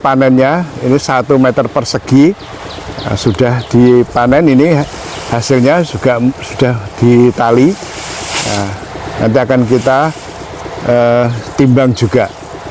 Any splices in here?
no; 0 cuts

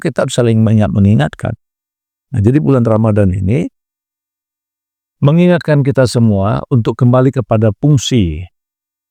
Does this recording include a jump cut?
no; 0 cuts

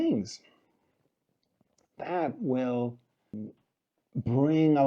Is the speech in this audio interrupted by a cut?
yes; 1 cut; at 3.4 s

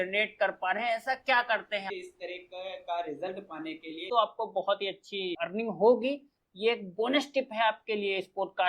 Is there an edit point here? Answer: yes; 3 cuts; at 1.9 s, 4.0 s, 5.4 s

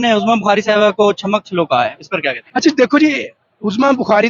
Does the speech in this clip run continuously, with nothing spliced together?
yes; 0 cuts

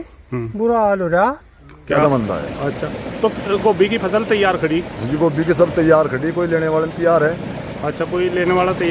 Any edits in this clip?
yes; 1 cut; at 2.0 s

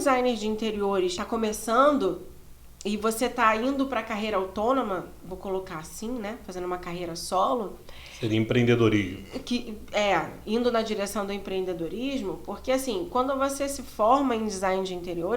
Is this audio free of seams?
no; 1 cut; at 1.2 s

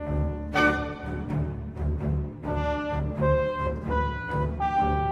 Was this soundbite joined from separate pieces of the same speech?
no; 0 cuts

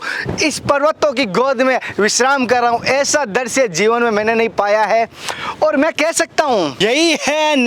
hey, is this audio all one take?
no; 1 cut; at 6.7 s

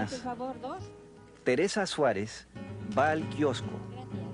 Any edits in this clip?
no; 0 cuts

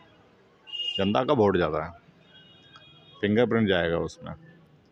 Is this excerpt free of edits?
yes; 0 cuts

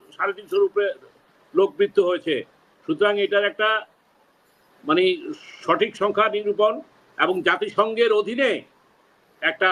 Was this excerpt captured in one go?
yes; 0 cuts

